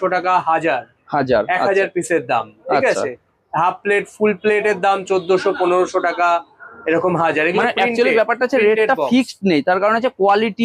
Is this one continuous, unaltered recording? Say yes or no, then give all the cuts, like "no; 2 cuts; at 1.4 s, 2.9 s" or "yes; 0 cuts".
yes; 0 cuts